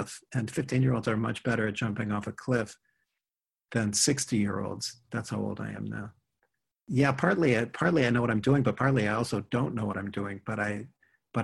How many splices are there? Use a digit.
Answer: 1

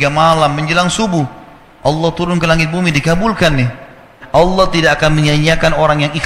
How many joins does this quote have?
1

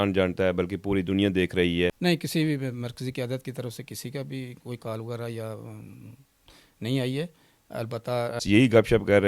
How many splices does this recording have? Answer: 2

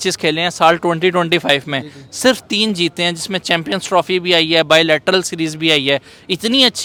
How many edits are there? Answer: 0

